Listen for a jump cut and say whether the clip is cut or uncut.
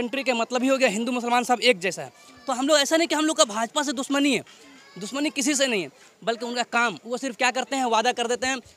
uncut